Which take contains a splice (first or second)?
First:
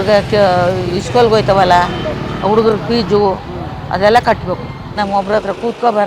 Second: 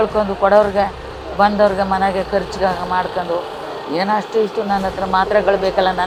first